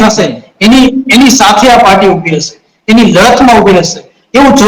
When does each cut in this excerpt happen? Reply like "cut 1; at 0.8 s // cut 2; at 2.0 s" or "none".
none